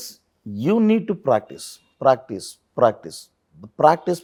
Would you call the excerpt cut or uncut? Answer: uncut